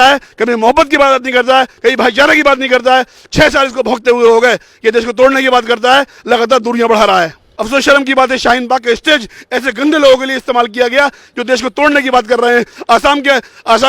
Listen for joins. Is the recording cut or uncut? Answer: cut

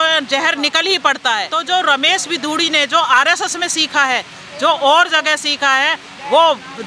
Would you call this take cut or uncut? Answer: cut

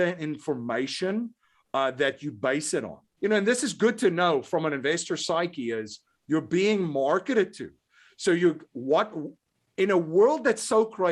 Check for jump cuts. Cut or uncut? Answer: cut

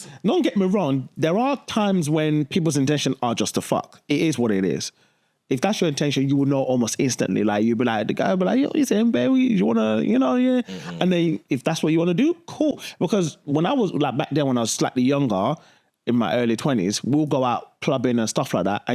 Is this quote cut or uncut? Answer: uncut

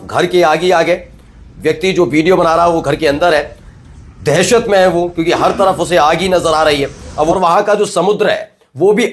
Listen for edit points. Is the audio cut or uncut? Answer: cut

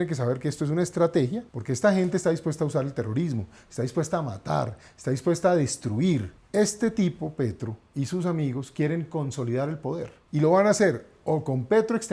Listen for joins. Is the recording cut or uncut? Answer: cut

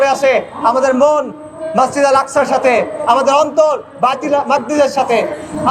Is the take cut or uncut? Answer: uncut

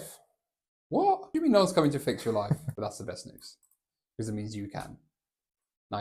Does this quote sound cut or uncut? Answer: cut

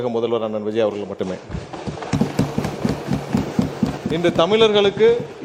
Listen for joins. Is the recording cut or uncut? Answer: uncut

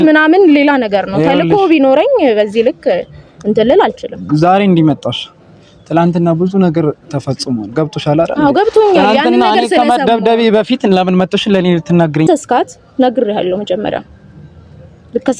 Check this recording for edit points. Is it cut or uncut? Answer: cut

